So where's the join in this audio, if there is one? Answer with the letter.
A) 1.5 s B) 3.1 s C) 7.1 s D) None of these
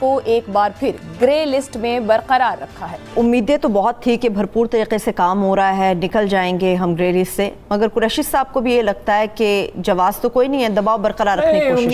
B